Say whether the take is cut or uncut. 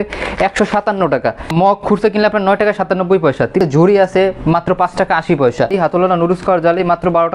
cut